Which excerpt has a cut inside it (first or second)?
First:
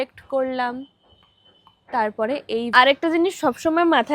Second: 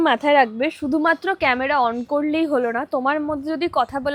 first